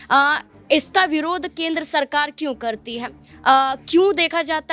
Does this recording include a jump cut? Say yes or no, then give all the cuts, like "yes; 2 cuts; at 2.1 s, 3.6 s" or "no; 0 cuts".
no; 0 cuts